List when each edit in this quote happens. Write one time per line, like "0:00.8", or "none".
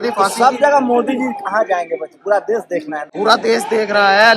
0:03.0